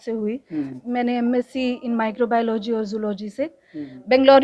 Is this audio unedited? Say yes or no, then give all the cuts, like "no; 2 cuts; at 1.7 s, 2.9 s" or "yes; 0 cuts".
yes; 0 cuts